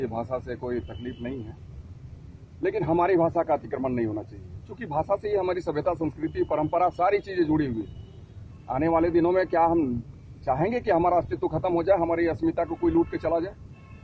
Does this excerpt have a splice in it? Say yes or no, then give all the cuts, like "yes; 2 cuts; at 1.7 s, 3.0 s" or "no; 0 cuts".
no; 0 cuts